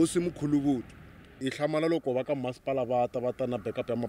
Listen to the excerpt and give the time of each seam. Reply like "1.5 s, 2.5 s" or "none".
1.5 s